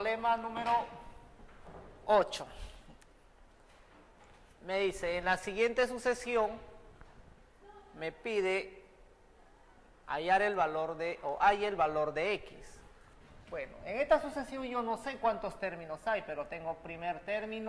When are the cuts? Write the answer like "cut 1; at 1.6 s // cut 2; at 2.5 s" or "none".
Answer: none